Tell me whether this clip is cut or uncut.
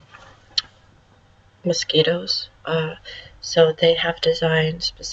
uncut